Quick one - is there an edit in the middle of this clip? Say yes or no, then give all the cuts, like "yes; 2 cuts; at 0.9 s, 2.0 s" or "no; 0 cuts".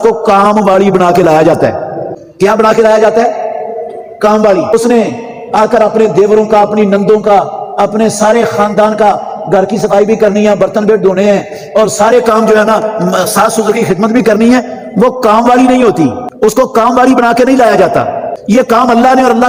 no; 0 cuts